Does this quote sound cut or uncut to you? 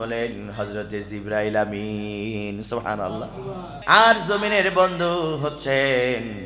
cut